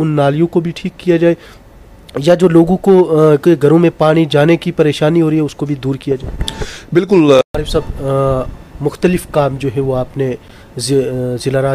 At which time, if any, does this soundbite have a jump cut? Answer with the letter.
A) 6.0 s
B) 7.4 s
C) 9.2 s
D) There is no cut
B